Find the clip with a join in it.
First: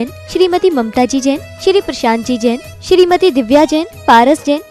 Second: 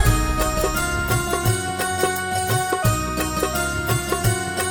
second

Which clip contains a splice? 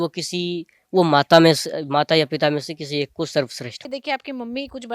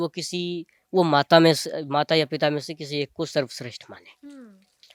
first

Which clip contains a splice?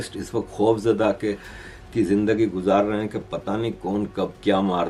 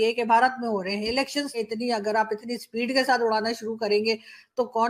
second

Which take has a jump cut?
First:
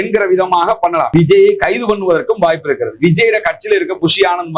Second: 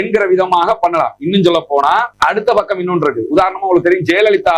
first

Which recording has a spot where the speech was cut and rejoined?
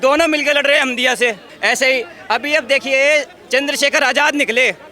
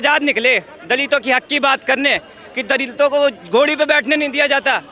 first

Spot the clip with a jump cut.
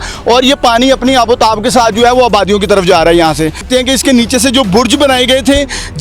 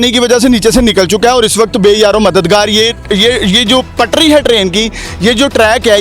first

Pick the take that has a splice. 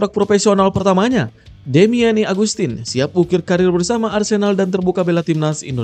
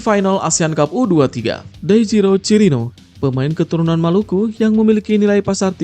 second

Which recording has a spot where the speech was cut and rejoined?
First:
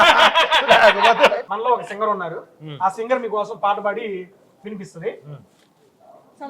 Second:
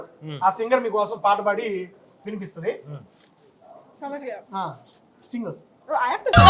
first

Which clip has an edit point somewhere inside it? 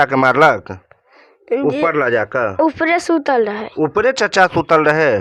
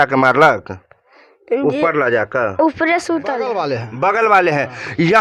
second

